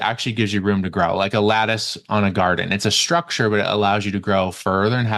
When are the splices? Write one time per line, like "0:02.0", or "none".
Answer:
none

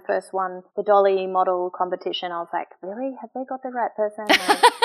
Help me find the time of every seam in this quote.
none

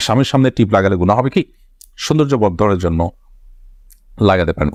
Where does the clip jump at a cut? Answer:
none

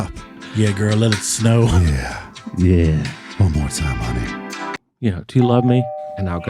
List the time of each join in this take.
0:04.8

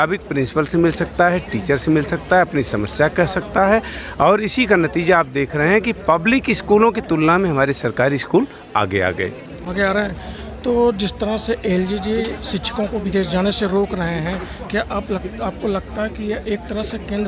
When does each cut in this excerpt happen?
none

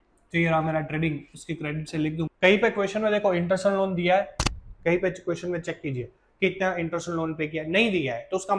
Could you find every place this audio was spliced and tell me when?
0:02.3

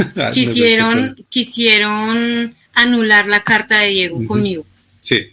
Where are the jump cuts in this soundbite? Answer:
none

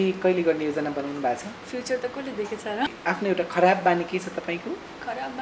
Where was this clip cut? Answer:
0:03.0

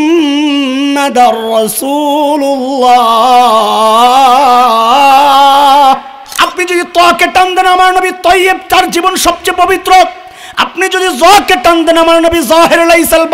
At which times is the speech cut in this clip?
0:06.2

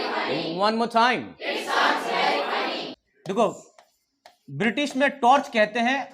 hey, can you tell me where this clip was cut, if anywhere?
0:02.8

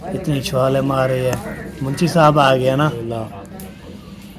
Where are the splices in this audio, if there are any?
0:03.0

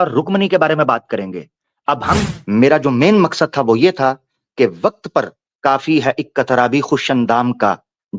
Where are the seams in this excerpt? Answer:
0:02.2

